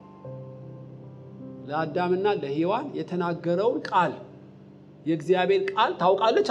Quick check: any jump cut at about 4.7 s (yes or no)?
no